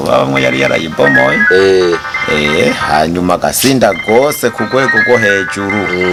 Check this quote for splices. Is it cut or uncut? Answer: uncut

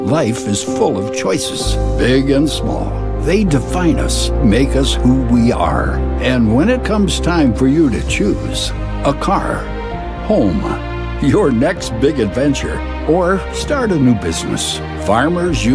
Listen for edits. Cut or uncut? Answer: uncut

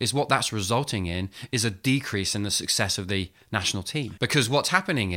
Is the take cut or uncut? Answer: cut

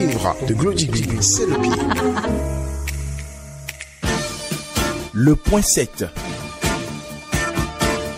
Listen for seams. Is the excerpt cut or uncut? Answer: cut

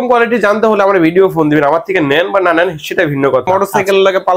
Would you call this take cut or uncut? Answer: cut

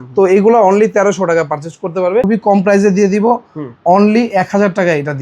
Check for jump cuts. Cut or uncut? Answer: cut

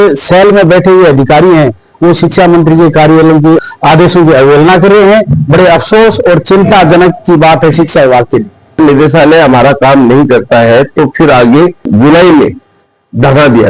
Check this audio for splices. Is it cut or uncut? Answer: cut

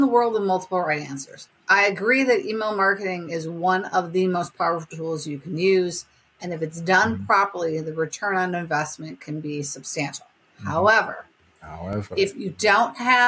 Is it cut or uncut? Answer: uncut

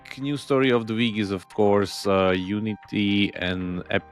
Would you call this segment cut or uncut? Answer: uncut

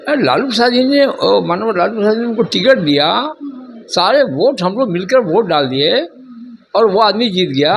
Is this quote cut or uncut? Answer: uncut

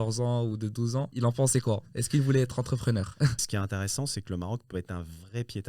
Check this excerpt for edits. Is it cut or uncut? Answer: cut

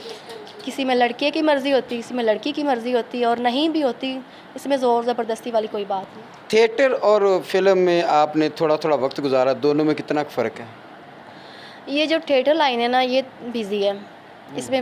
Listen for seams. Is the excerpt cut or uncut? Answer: uncut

